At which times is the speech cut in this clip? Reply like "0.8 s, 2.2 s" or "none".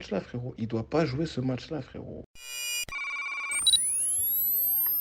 2.4 s